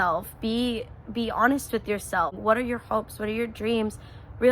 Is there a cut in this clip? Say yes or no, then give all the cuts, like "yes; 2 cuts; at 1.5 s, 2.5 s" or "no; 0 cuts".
yes; 1 cut; at 2.4 s